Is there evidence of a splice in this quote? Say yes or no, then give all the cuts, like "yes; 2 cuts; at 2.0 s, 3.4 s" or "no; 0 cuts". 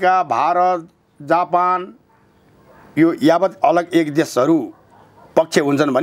no; 0 cuts